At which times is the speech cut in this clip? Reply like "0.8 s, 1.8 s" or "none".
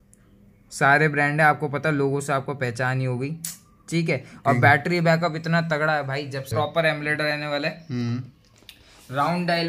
6.5 s